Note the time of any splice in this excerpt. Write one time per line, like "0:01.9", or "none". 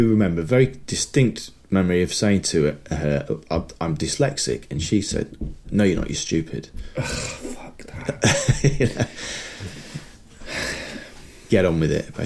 none